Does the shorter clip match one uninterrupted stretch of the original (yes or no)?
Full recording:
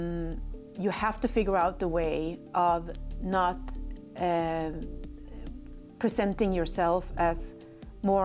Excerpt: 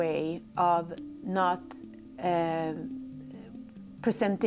yes